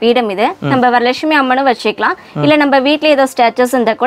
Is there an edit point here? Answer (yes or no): no